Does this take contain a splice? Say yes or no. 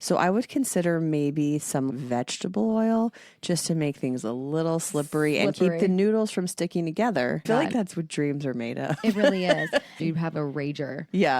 yes